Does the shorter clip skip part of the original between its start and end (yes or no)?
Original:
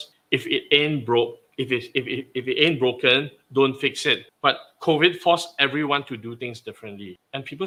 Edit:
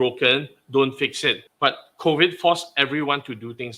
no